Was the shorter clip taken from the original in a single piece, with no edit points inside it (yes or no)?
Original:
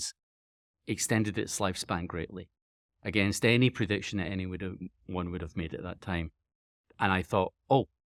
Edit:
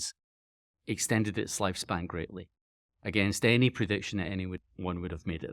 no